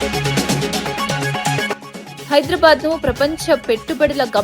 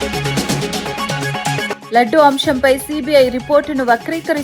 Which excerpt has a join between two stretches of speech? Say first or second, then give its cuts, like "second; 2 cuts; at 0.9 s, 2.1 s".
first; 1 cut; at 1.8 s